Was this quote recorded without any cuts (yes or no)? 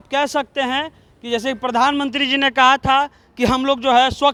yes